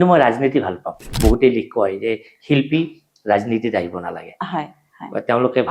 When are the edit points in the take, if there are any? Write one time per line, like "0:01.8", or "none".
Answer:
0:01.1